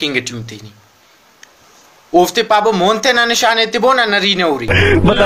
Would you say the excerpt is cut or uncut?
uncut